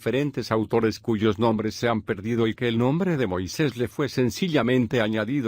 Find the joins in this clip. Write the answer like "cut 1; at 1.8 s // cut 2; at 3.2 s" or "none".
cut 1; at 3.9 s